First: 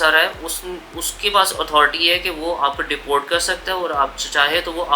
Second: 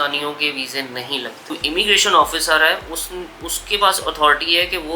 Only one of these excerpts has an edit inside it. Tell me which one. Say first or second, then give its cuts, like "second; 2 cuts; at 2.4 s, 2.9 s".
second; 1 cut; at 1.6 s